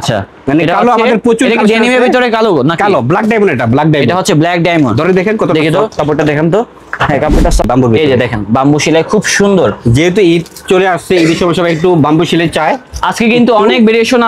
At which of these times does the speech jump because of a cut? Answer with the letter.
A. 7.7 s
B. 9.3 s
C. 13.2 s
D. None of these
A